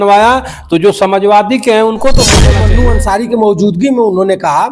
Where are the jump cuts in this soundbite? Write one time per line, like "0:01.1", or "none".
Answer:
0:02.6